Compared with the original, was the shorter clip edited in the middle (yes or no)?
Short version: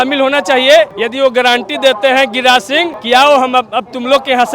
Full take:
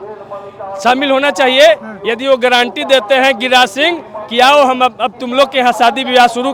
yes